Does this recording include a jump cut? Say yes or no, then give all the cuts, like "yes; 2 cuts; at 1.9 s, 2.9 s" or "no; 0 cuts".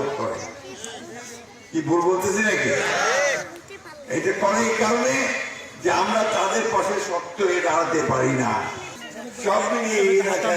yes; 1 cut; at 8.8 s